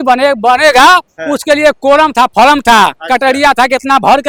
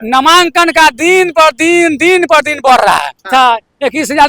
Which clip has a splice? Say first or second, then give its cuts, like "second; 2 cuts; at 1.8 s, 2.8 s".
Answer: second; 1 cut; at 3.3 s